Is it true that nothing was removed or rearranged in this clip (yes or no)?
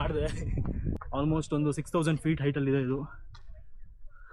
no